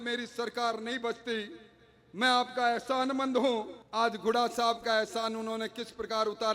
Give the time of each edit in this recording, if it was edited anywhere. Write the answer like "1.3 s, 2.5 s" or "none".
3.8 s